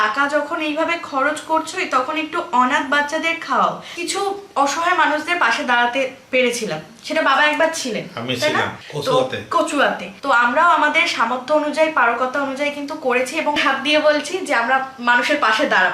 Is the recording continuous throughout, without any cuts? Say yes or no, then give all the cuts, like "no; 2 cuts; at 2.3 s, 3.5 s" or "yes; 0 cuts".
no; 4 cuts; at 4.0 s, 8.8 s, 10.1 s, 13.6 s